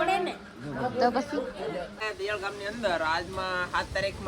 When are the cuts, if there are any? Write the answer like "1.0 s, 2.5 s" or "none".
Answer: 2.0 s